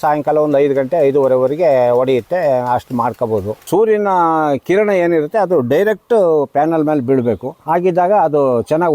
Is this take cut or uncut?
cut